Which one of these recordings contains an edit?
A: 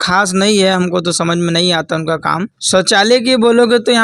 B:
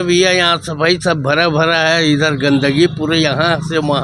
A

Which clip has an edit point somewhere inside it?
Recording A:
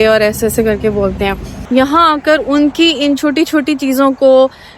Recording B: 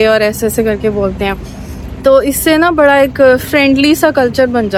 A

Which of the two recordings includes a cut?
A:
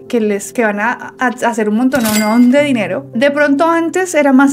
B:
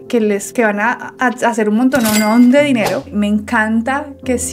B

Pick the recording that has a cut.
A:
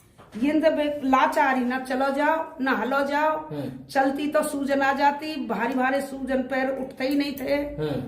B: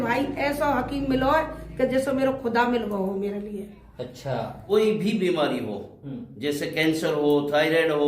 B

